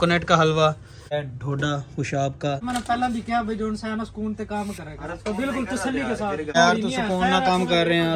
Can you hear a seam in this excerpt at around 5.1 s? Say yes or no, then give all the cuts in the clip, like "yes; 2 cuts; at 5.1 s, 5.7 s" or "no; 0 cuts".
no; 3 cuts; at 1.1 s, 2.6 s, 6.5 s